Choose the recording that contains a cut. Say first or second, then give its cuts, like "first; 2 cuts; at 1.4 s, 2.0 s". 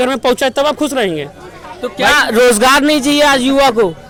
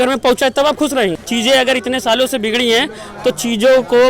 second; 1 cut; at 1.2 s